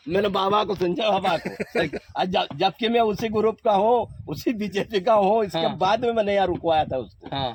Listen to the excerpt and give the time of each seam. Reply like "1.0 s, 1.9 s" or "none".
none